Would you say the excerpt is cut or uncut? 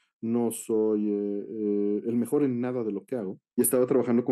cut